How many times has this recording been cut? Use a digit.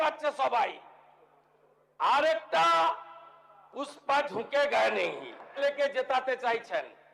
1